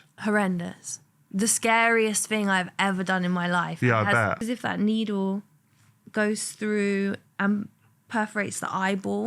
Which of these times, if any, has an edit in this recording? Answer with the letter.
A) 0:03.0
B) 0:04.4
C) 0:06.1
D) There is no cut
B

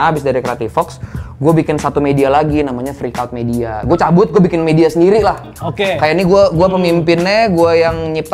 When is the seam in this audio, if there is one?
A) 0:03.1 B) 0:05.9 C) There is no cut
C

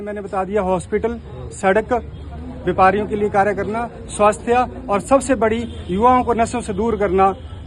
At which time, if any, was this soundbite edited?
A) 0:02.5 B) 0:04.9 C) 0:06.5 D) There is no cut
A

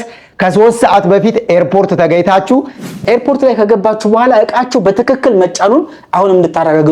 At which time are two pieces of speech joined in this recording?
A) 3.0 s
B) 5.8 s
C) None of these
A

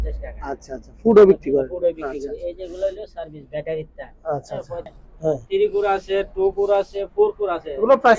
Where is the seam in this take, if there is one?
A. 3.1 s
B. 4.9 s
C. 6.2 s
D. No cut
B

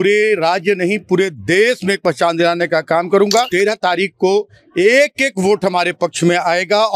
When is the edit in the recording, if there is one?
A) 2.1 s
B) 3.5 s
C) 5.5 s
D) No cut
B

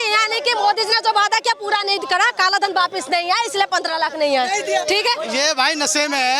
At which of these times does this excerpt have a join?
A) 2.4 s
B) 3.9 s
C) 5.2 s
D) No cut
C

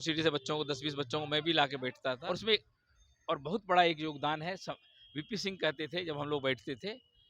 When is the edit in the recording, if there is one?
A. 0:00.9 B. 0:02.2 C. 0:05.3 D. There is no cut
B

